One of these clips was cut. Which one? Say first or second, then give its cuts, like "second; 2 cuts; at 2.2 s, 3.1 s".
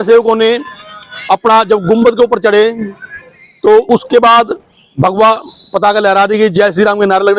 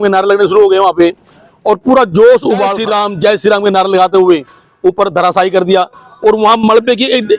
second; 1 cut; at 2.8 s